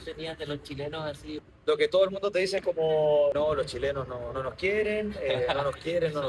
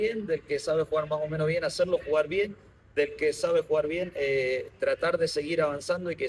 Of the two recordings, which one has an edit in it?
first; 2 cuts; at 1.2 s, 3.3 s

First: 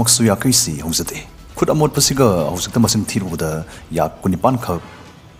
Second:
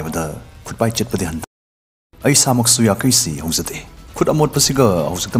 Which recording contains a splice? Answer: second; 1 cut; at 1.4 s

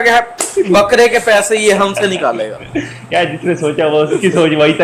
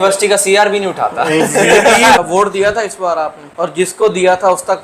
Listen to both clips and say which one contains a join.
second; 2 cuts; at 2.2 s, 3.4 s

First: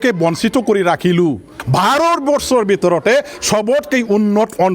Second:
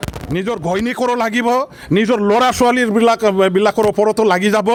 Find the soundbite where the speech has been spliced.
first; 1 cut; at 1.6 s

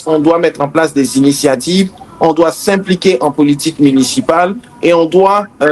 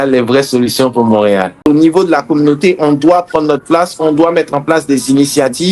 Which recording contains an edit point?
second; 1 cut; at 1.6 s

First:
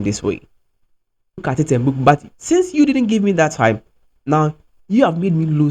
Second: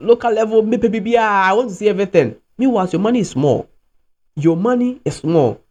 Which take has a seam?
first; 1 cut; at 1.4 s

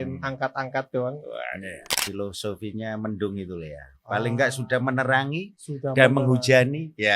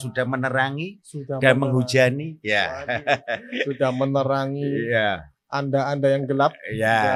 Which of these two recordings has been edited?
first; 1 cut; at 2.0 s

